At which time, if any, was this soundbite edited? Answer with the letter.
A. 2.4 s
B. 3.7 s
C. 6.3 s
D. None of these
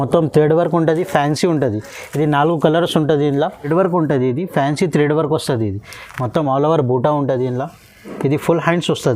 B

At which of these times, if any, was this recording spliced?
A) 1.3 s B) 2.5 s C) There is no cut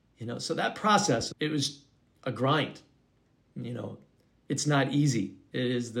A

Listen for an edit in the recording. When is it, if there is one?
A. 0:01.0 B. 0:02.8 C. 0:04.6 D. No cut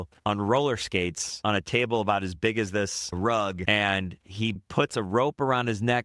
C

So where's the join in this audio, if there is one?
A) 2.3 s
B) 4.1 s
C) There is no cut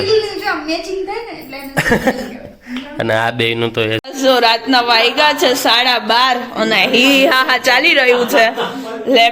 B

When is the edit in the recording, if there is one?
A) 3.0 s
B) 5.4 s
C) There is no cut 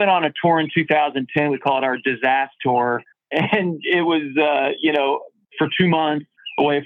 C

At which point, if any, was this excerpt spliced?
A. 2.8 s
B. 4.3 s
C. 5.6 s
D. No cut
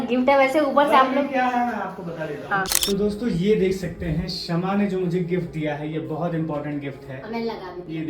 A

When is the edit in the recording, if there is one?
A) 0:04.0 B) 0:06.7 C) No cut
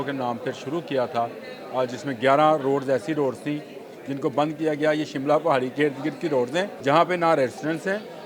B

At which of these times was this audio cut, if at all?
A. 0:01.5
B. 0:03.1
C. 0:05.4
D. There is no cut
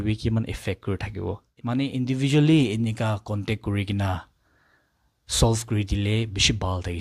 A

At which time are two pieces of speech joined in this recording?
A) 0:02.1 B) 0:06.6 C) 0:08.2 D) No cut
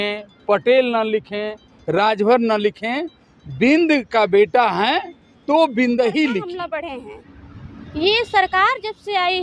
B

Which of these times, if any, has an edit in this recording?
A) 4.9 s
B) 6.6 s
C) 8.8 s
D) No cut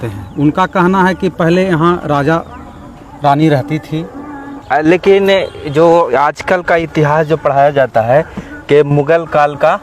A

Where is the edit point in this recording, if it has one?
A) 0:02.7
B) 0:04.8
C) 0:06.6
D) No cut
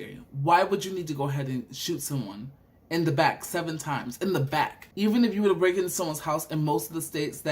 B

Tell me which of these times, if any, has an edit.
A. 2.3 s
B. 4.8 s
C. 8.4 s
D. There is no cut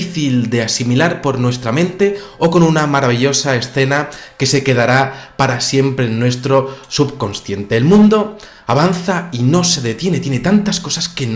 D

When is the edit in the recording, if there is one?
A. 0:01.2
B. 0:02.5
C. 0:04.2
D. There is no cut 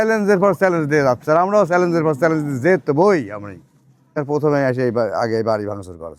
C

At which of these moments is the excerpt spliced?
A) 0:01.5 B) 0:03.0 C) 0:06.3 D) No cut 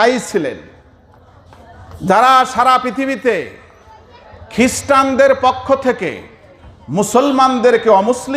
D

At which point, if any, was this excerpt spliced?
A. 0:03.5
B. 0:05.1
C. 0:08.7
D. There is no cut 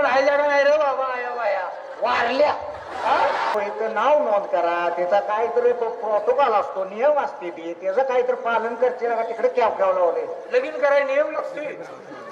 A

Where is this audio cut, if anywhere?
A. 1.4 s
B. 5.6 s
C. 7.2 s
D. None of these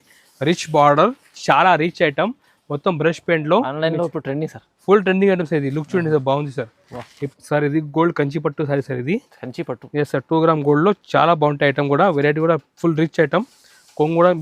C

